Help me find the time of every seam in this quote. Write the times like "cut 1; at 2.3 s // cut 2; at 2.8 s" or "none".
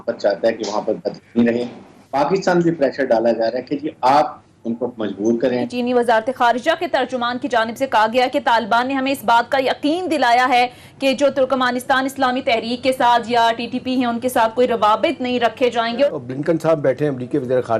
cut 1; at 2.1 s // cut 2; at 5.7 s // cut 3; at 16.1 s